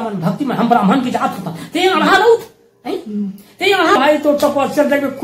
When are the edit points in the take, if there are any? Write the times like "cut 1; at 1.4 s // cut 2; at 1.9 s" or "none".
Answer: cut 1; at 4.0 s

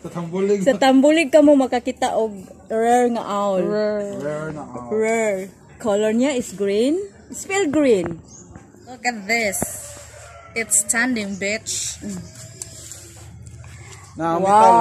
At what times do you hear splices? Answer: cut 1; at 8.5 s

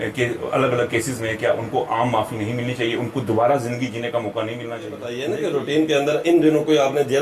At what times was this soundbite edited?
cut 1; at 5.1 s

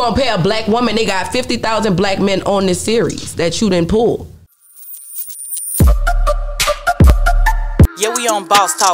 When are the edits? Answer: cut 1; at 4.6 s

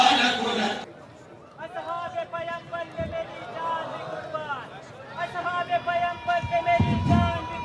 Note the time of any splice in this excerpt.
cut 1; at 0.9 s

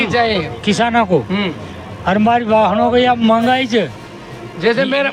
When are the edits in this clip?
none

